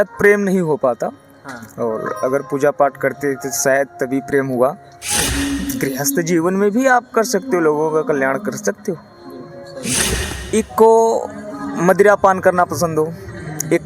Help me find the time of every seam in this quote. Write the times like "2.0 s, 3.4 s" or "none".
5.2 s, 10.1 s

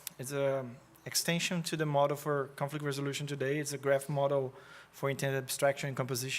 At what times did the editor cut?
3.7 s

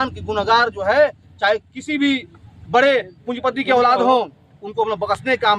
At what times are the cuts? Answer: none

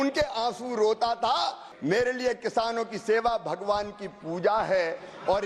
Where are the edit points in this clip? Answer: 1.7 s

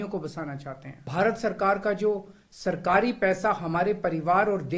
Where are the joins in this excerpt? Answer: 0.9 s

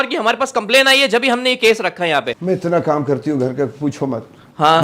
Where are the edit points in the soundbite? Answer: 2.3 s

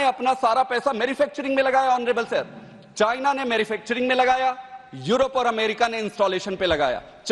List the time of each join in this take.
none

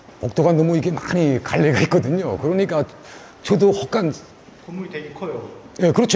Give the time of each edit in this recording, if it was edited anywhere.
none

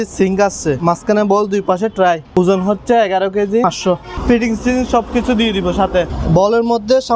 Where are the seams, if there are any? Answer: 0.8 s, 2.4 s, 3.9 s, 6.2 s

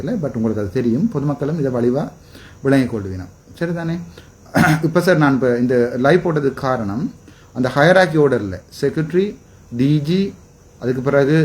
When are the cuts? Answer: none

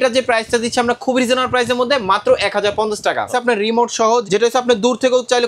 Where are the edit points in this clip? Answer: 3.3 s, 4.2 s

